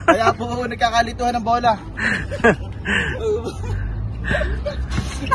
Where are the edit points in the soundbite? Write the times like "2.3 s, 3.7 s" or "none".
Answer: none